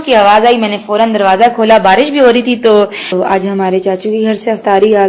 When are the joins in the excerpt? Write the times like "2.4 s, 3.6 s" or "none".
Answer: 3.0 s